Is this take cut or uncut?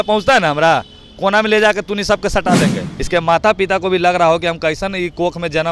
cut